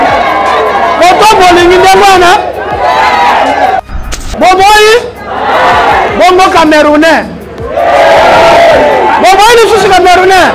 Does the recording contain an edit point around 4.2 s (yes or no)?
yes